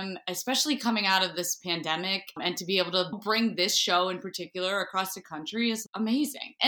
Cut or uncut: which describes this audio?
uncut